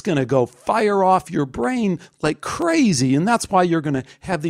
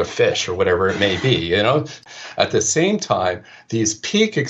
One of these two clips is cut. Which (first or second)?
second